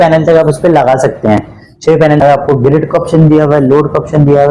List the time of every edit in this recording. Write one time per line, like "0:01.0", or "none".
0:02.2

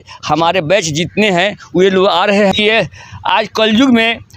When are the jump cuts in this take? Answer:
0:02.5

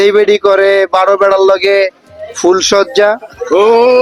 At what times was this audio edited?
none

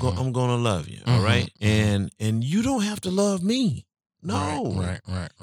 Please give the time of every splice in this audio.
0:01.5
0:04.1

